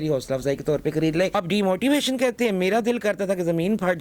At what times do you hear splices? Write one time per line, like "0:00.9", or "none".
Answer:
0:01.3